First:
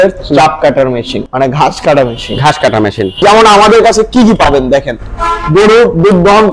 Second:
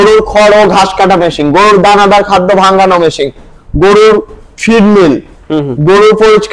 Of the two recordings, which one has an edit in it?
first; 2 cuts; at 1.2 s, 3.2 s

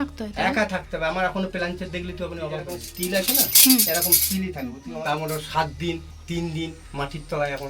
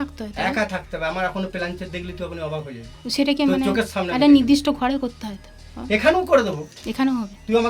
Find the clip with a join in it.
first; 2 cuts; at 2.8 s, 4.8 s

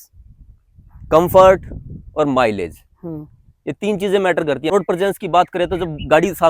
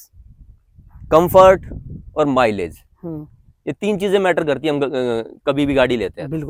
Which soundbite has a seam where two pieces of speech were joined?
first; 1 cut; at 4.7 s

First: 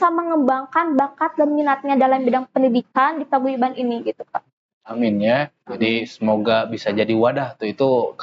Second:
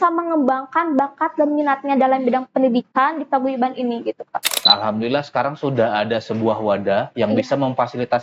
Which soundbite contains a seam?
second; 1 cut; at 4.6 s

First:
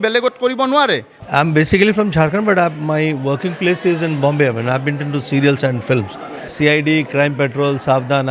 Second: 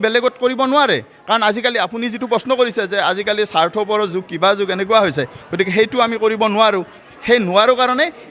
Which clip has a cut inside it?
first; 2 cuts; at 1.1 s, 6.5 s

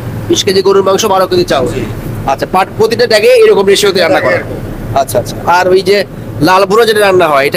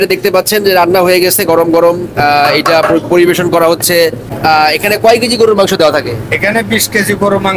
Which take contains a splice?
second; 1 cut; at 4.3 s

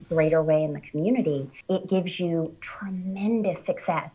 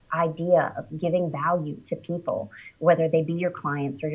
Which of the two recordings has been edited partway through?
first; 1 cut; at 1.5 s

